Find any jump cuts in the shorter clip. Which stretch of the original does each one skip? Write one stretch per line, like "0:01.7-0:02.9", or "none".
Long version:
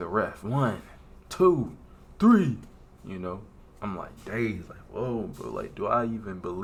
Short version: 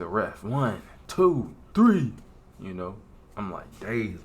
0:01.3-0:01.7